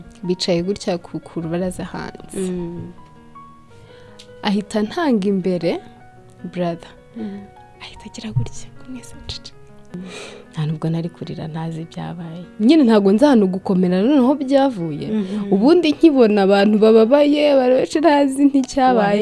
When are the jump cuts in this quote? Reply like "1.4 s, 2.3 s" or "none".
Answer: 9.9 s